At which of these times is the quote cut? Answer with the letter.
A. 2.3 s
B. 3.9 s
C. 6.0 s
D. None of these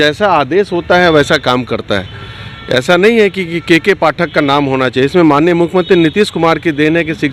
D